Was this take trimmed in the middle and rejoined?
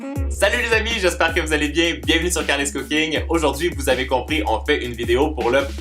yes; 1 cut; at 4.6 s

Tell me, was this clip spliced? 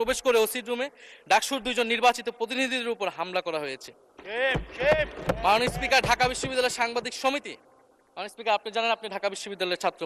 no; 0 cuts

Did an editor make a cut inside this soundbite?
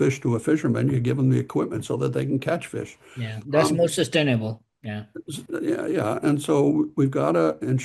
no; 0 cuts

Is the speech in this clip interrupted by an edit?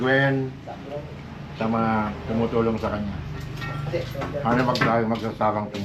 no; 0 cuts

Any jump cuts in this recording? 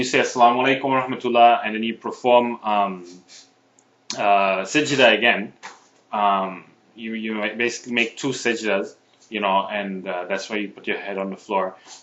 no; 0 cuts

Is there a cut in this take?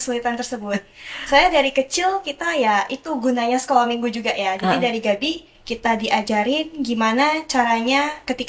no; 0 cuts

